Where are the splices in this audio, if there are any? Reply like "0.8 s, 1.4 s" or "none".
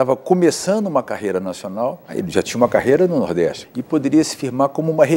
2.2 s, 3.7 s